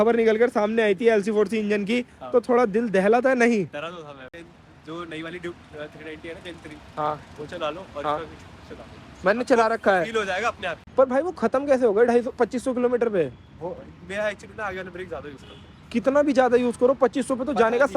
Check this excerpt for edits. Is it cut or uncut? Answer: cut